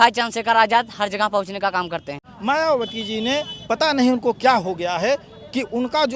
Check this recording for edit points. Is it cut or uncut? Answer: cut